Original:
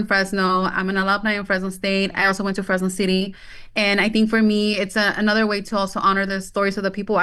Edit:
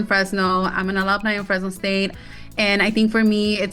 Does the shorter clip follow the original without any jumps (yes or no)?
no